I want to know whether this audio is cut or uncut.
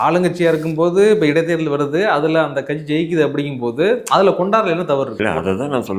uncut